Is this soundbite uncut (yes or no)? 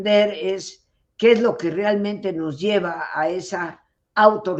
yes